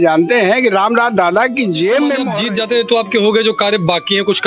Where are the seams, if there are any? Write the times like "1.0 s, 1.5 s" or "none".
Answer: 2.3 s